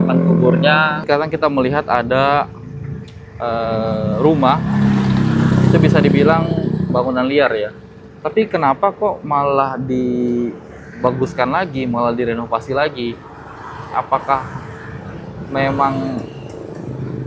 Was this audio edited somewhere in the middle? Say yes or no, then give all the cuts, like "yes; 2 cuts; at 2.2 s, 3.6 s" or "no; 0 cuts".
yes; 1 cut; at 1.0 s